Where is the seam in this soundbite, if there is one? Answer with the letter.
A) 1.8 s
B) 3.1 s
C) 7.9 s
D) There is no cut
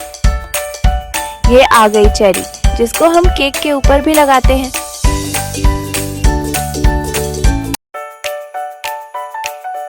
C